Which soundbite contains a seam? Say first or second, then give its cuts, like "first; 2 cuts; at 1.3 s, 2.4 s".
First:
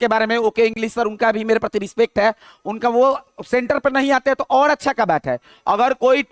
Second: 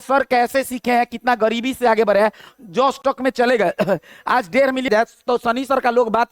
second; 1 cut; at 4.9 s